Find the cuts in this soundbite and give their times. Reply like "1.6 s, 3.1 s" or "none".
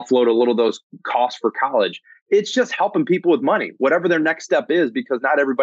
none